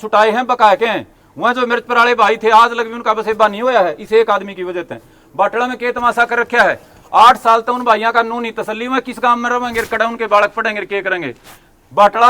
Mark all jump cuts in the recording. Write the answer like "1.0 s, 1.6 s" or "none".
none